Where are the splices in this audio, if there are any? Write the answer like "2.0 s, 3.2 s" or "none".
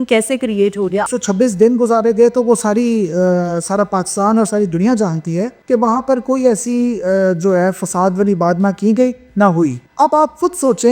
1.1 s, 5.5 s, 9.8 s